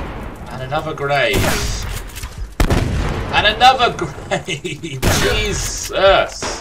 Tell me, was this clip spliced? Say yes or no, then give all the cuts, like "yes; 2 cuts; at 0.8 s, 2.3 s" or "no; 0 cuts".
no; 0 cuts